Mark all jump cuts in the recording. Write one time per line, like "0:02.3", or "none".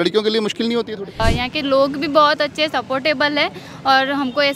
0:01.2